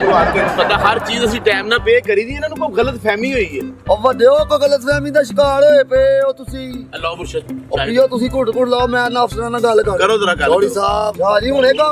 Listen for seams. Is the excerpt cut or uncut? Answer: cut